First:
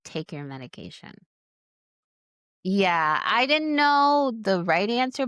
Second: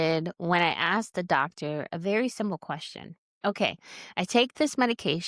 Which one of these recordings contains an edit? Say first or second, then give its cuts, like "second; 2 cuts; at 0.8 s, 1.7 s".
first; 1 cut; at 2.0 s